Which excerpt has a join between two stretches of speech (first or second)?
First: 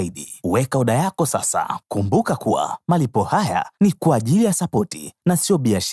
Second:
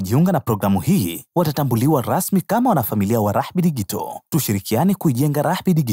first